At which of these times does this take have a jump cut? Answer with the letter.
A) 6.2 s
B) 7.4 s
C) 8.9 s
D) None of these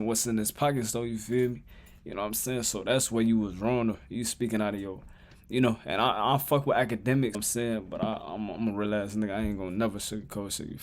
B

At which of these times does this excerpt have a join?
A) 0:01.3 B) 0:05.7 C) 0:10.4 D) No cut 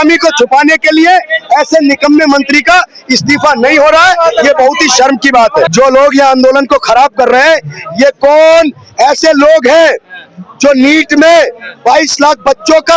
B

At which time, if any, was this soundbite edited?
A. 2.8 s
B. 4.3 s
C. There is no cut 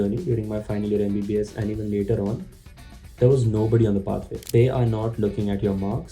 B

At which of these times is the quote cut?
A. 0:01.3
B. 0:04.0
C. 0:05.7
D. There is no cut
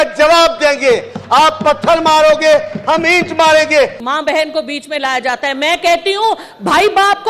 B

